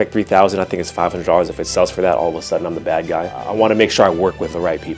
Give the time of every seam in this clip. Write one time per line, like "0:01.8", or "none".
none